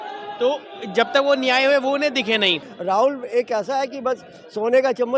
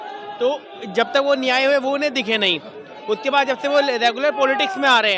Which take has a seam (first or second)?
first